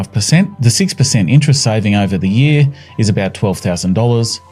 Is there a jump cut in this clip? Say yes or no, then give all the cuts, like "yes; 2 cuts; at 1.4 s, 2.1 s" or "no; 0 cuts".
no; 0 cuts